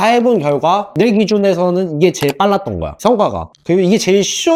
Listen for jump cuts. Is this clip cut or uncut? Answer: uncut